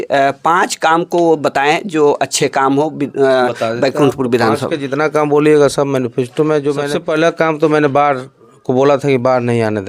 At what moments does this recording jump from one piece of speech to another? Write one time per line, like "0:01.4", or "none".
0:06.9